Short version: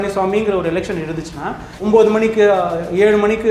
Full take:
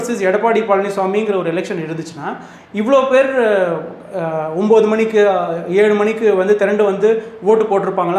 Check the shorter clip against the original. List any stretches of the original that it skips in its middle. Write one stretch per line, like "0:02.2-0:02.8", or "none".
0:02.6-0:04.5